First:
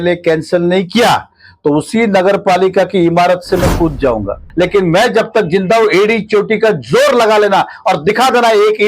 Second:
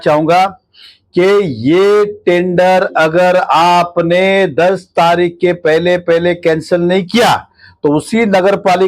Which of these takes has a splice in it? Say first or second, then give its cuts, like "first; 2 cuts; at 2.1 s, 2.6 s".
first; 1 cut; at 4.4 s